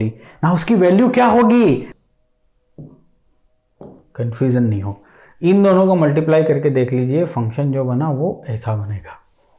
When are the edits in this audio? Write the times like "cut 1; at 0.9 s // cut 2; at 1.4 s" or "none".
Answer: cut 1; at 1.9 s